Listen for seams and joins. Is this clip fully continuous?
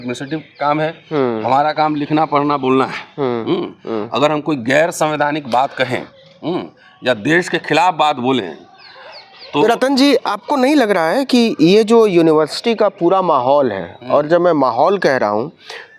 yes; 0 cuts

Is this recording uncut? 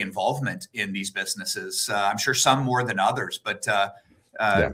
yes; 0 cuts

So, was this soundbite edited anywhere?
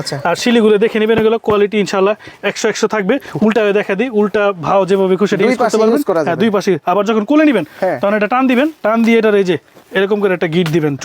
no; 0 cuts

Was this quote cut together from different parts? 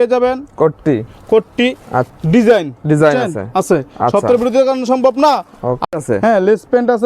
yes; 2 cuts; at 2.1 s, 5.8 s

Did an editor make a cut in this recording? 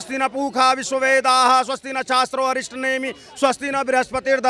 no; 0 cuts

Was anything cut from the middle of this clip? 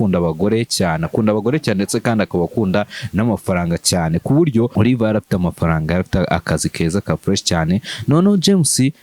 yes; 1 cut; at 4.7 s

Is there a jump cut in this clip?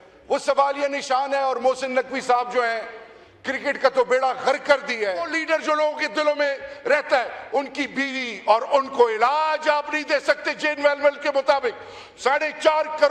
yes; 1 cut; at 5.3 s

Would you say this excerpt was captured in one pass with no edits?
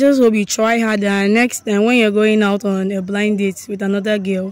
yes; 0 cuts

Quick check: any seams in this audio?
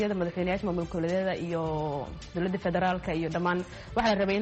no; 0 cuts

